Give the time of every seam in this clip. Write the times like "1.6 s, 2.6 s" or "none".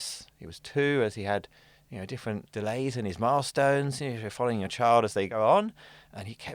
2.5 s, 5.3 s